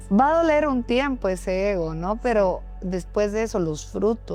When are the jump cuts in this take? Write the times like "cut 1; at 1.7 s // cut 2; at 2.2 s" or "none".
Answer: none